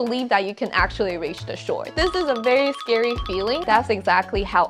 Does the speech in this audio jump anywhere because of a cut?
yes; 1 cut; at 3.6 s

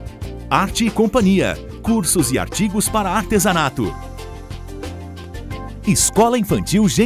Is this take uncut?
no; 1 cut; at 5.8 s

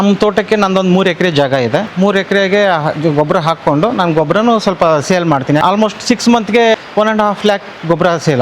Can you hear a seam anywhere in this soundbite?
yes; 2 cuts; at 5.6 s, 6.7 s

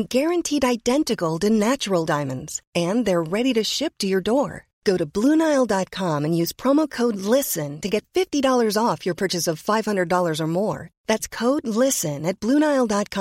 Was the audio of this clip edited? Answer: no; 0 cuts

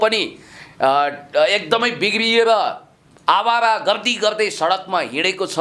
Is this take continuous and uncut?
yes; 0 cuts

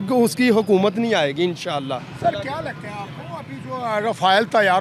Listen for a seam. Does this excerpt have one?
no; 0 cuts

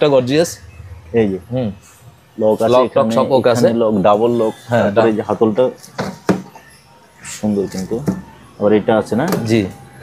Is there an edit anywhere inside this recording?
no; 0 cuts

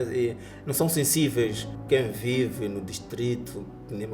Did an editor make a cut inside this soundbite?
yes; 1 cut; at 1.7 s

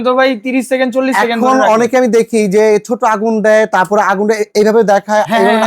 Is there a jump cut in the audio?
no; 0 cuts

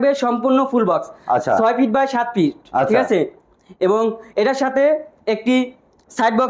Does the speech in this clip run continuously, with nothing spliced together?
yes; 0 cuts

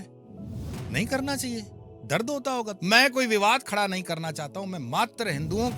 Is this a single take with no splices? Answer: no; 1 cut; at 2.7 s

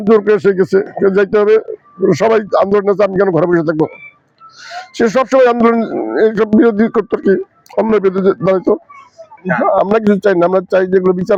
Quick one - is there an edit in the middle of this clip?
no; 0 cuts

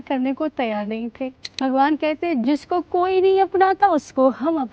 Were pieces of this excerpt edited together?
yes; 2 cuts; at 1.4 s, 2.4 s

